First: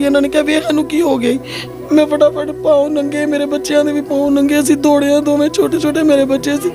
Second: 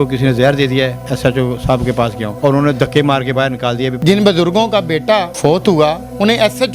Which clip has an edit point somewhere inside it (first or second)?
second